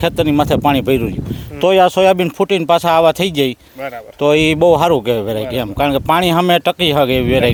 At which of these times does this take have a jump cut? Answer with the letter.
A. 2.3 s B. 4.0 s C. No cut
C